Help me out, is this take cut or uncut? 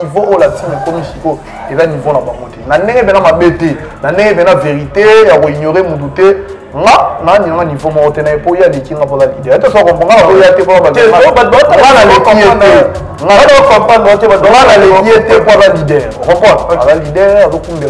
uncut